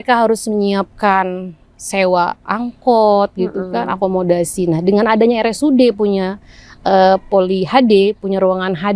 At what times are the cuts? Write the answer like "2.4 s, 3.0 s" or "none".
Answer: none